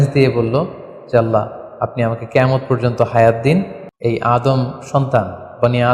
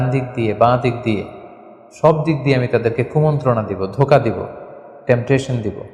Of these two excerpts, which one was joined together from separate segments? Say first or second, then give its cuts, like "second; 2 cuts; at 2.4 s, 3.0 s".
first; 1 cut; at 3.8 s